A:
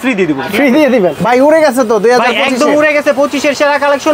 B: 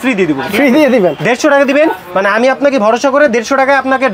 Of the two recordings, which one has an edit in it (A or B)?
A